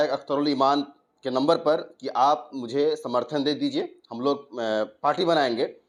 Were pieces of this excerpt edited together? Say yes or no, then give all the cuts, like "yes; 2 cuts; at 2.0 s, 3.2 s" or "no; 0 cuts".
no; 0 cuts